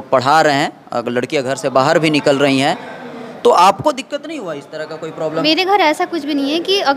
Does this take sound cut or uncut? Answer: cut